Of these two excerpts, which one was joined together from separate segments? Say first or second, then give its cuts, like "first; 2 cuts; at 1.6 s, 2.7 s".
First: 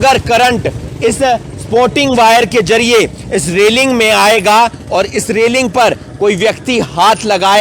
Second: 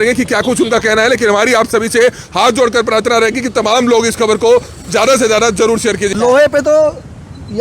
second; 1 cut; at 6.1 s